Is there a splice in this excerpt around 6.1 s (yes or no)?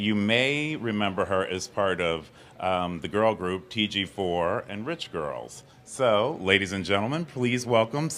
no